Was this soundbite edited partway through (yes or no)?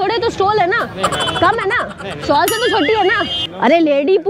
yes